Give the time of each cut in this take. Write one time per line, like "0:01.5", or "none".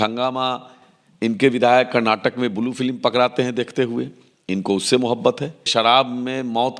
0:05.7